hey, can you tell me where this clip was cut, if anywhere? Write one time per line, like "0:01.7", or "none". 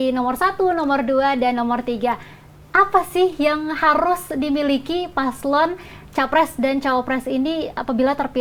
none